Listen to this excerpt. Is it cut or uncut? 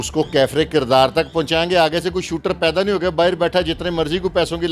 uncut